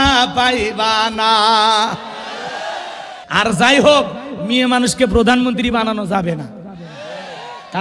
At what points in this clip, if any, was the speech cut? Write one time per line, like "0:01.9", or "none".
0:03.2